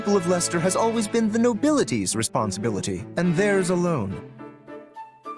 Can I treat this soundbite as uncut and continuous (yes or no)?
no